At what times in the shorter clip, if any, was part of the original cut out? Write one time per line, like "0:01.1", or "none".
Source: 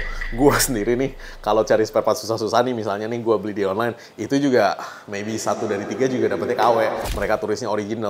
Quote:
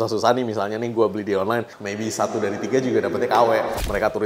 0:01.8